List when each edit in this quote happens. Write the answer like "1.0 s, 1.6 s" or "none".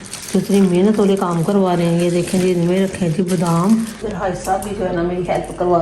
4.1 s